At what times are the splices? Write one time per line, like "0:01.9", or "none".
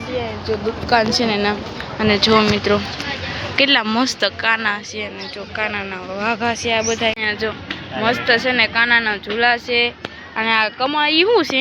0:07.2